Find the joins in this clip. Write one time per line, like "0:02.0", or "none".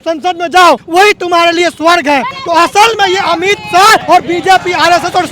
0:02.4
0:04.0